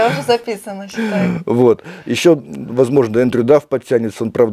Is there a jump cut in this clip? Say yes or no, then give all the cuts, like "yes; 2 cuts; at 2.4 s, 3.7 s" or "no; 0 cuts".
no; 0 cuts